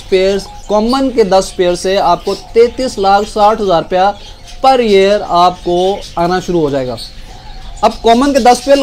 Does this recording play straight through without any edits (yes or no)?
yes